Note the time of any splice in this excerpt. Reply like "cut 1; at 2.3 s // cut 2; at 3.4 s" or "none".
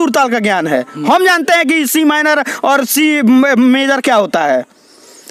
none